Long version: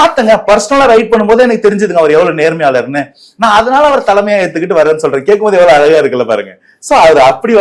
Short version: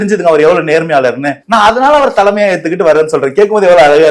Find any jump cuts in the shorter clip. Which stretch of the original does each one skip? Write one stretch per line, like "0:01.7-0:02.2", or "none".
0:03.0-0:03.2